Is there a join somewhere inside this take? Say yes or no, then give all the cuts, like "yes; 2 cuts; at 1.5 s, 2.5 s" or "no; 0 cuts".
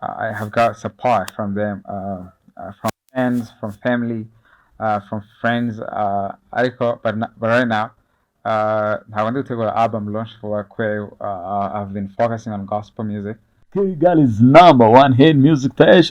yes; 1 cut; at 13.9 s